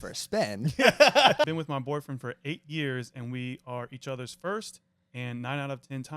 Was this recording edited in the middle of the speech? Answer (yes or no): yes